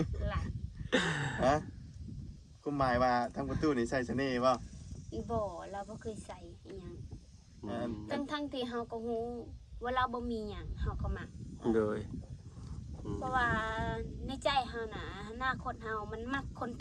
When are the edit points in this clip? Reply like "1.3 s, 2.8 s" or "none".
none